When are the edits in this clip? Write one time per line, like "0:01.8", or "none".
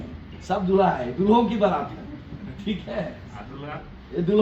none